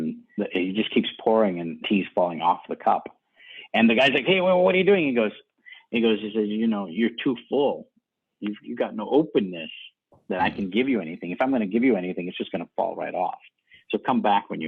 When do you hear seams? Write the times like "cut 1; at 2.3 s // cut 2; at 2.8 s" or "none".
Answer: none